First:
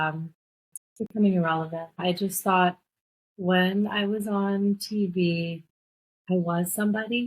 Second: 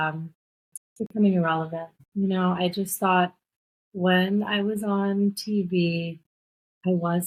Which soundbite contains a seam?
first; 1 cut; at 2.0 s

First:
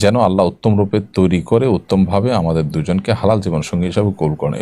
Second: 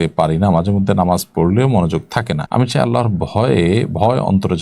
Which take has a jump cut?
second; 1 cut; at 2.4 s

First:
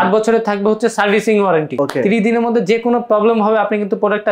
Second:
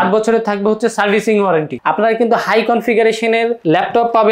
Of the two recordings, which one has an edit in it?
second; 1 cut; at 1.7 s

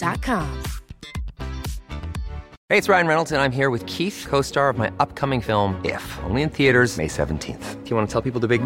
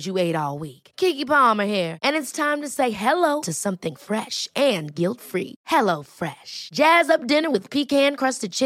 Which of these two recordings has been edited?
first; 1 cut; at 2.5 s

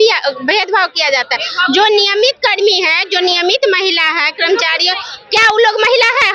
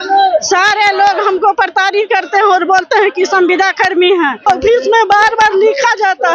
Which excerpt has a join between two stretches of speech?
second; 1 cut; at 4.4 s

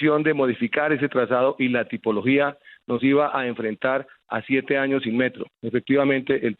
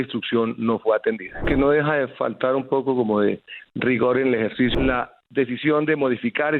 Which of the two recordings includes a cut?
second; 2 cuts; at 1.4 s, 4.7 s

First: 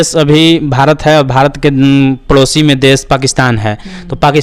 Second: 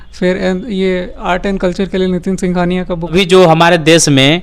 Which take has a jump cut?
second; 1 cut; at 3.1 s

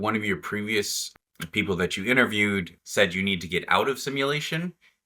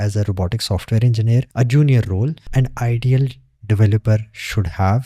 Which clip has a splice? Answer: second; 2 cuts; at 1.5 s, 2.4 s

